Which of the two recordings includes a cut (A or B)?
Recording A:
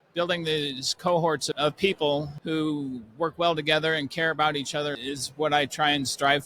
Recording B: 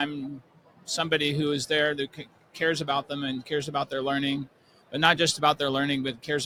A